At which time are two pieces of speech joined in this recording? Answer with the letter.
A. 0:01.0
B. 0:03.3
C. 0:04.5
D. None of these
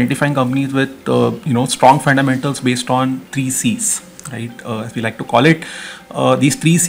D